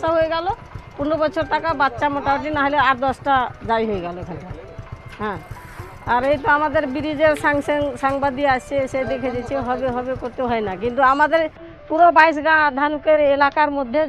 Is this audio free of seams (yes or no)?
yes